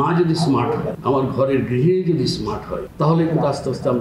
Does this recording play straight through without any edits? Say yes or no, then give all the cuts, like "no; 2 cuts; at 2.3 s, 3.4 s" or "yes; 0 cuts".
no; 2 cuts; at 0.9 s, 2.8 s